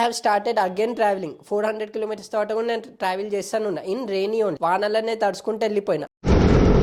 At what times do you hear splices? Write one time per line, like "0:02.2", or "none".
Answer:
none